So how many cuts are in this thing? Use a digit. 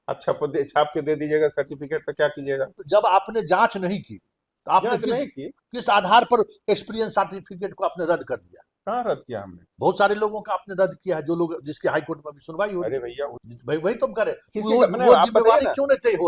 2